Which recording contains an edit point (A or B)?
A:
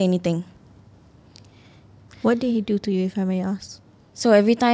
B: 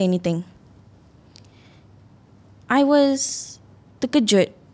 A